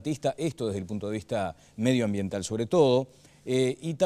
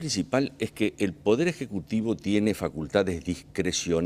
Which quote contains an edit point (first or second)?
second